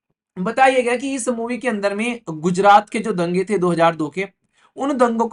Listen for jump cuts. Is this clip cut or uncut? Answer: uncut